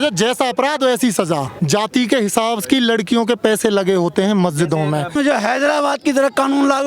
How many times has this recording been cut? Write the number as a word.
two